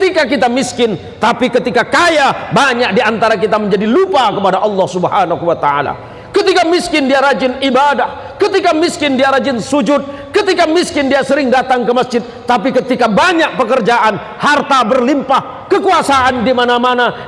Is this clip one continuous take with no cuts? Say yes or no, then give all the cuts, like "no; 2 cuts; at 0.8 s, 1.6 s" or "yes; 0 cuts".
yes; 0 cuts